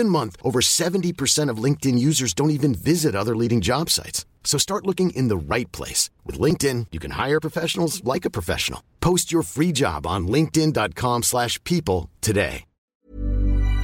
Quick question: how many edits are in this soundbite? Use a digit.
1